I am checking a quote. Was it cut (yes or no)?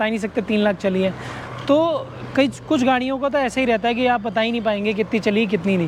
no